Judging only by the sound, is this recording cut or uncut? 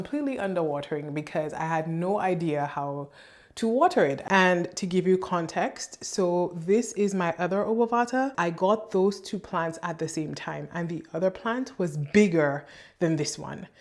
cut